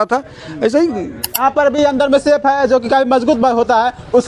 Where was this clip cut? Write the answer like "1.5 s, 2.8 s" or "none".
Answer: 1.4 s